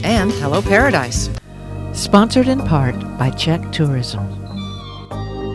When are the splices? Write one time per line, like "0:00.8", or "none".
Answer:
none

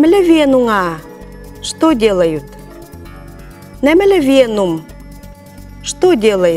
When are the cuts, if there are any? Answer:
none

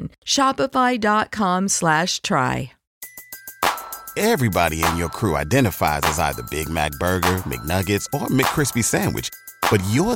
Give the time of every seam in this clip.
0:02.9

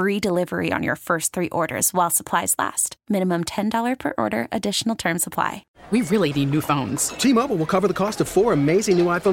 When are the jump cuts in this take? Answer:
0:05.7

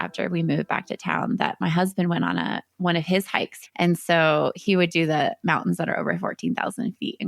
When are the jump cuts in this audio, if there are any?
0:03.5

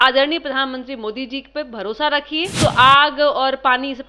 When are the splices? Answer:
0:02.5

